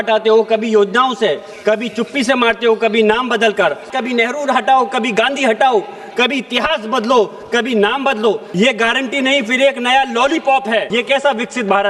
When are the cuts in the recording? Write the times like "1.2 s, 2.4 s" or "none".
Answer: 3.9 s, 8.5 s, 10.9 s